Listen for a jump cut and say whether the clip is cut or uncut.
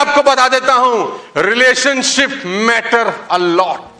uncut